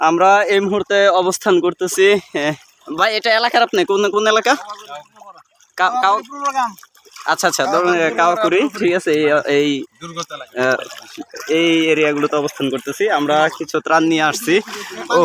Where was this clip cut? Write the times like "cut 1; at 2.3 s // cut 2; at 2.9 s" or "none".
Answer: none